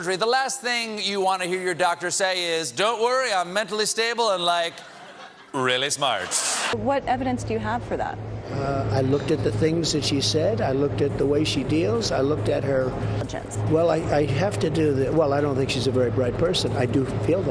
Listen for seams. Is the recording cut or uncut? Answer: uncut